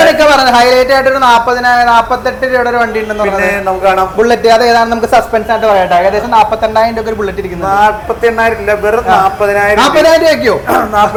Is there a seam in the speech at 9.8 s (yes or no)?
no